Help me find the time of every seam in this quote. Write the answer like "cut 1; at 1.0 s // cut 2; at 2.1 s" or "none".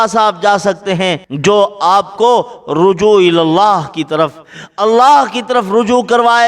cut 1; at 1.3 s